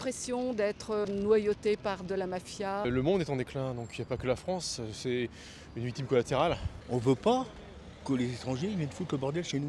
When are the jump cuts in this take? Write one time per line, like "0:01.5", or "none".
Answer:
0:01.1
0:02.8
0:06.7

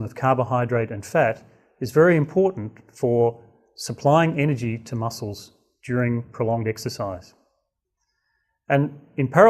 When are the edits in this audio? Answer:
0:02.2

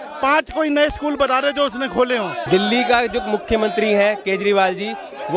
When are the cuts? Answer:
0:02.4

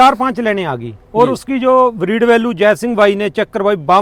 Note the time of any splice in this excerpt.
none

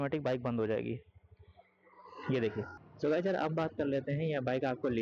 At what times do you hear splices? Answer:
0:02.8

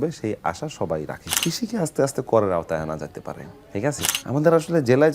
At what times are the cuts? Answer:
0:01.2
0:04.1

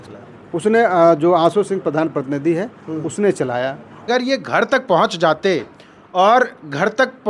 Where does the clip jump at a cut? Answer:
0:04.1

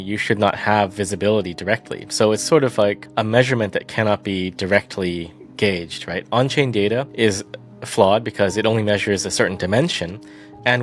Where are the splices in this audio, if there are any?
0:03.0
0:07.1

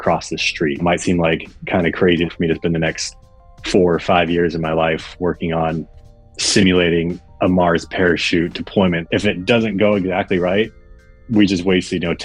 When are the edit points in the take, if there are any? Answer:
0:00.8
0:02.3
0:09.0

